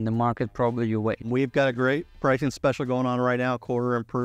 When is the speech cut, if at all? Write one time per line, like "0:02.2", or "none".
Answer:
0:01.2

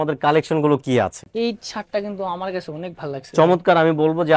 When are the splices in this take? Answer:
0:01.3

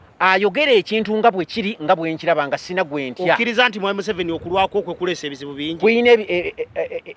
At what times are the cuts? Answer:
none

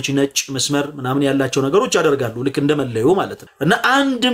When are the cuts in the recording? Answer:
0:03.4

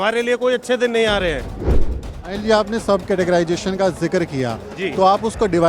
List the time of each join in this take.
0:01.8

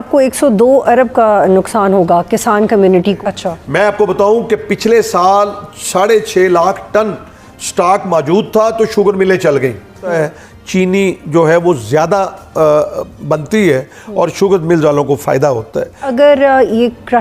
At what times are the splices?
0:03.2
0:10.0
0:16.0

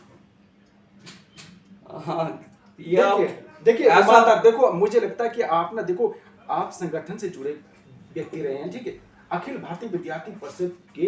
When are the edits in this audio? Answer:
none

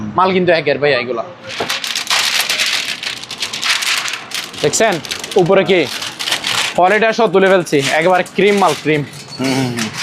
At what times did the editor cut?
0:01.4

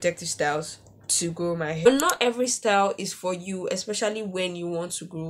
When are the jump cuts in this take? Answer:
0:01.9

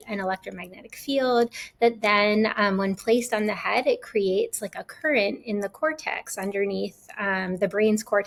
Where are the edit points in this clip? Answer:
none

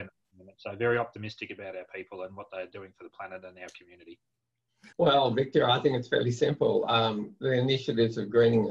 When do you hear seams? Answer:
0:04.8

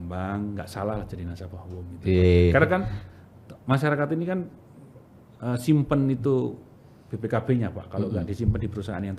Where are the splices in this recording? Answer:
none

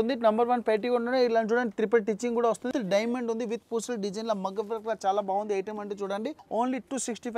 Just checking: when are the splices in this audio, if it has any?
0:02.7
0:06.4

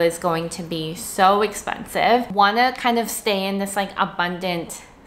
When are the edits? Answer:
0:02.3

